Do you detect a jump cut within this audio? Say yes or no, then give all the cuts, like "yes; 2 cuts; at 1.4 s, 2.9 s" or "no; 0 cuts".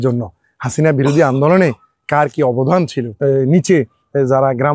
yes; 1 cut; at 3.0 s